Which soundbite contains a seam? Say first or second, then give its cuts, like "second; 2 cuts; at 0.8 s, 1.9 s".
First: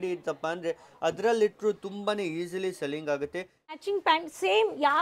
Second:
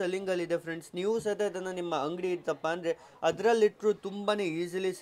first; 1 cut; at 3.7 s